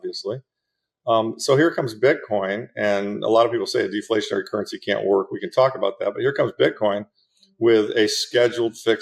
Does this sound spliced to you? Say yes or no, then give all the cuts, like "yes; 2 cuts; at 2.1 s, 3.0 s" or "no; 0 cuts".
no; 0 cuts